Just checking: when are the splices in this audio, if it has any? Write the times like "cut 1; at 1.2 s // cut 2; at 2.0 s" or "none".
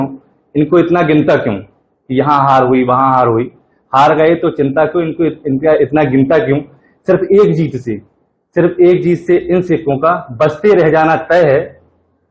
none